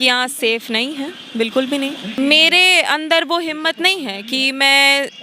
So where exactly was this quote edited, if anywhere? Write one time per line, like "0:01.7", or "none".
0:02.1